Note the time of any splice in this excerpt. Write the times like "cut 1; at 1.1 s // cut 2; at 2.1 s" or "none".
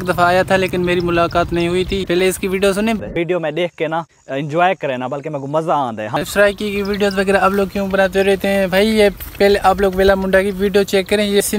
cut 1; at 2.0 s // cut 2; at 6.2 s